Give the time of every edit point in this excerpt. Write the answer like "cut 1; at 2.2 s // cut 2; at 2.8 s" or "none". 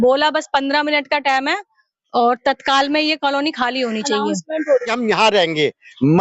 cut 1; at 4.9 s

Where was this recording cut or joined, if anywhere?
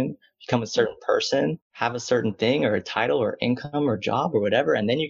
cut 1; at 1.7 s

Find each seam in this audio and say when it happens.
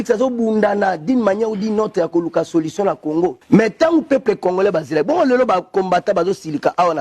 cut 1; at 1.8 s

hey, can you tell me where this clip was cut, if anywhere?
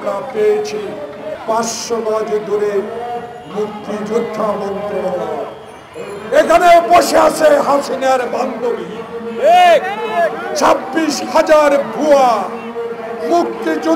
cut 1; at 1.3 s

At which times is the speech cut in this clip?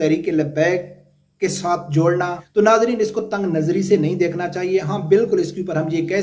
cut 1; at 2.4 s

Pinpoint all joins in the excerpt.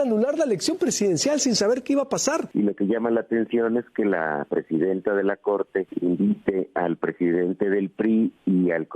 cut 1; at 2.5 s // cut 2; at 5.9 s

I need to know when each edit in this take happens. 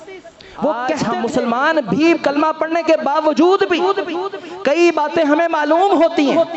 cut 1; at 1.0 s

